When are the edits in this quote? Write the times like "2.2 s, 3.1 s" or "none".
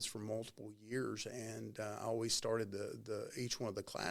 none